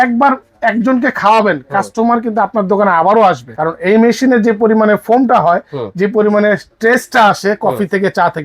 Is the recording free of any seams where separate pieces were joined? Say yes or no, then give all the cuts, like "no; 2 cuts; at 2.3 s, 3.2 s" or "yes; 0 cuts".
no; 1 cut; at 3.5 s